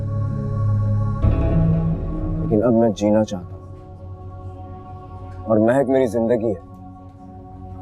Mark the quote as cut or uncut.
uncut